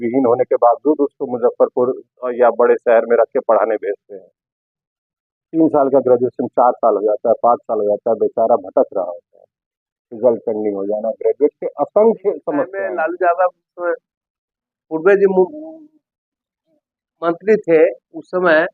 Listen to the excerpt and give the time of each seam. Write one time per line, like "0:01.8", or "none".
0:12.8